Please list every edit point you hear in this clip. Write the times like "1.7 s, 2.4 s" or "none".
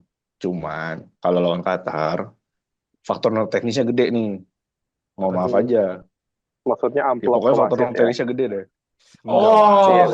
none